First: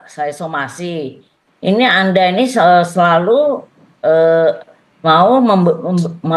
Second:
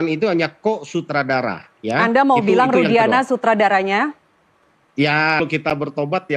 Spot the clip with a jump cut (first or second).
second